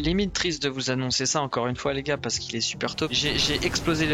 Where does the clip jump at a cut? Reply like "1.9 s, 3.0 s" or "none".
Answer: 3.1 s